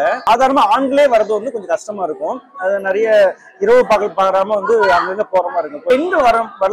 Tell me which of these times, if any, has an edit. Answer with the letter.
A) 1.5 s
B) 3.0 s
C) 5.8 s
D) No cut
C